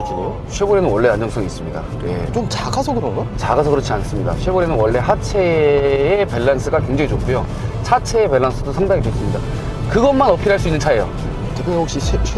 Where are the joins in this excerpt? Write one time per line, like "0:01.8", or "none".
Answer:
none

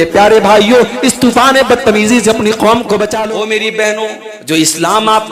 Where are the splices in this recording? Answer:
0:03.2
0:04.3

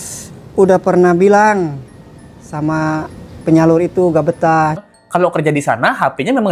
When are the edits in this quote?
0:04.8

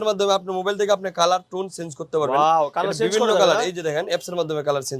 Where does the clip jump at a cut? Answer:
none

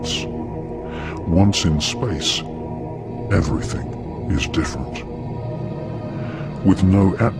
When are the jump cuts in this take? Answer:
0:05.9

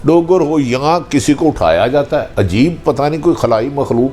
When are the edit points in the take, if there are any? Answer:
0:02.3

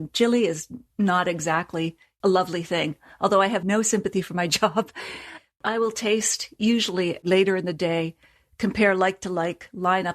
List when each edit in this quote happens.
0:02.0
0:03.6
0:05.6
0:07.2

